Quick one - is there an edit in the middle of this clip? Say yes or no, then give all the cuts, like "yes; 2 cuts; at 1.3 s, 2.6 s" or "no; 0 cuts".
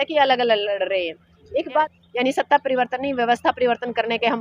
yes; 1 cut; at 1.9 s